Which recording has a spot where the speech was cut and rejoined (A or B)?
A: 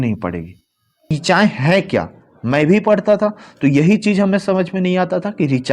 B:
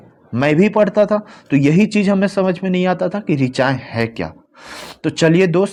A